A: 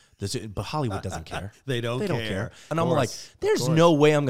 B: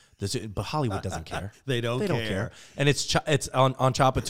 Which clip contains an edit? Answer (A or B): A